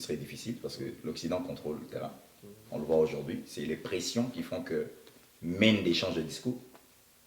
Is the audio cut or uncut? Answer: uncut